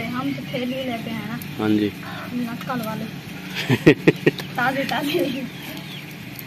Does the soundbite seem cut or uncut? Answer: uncut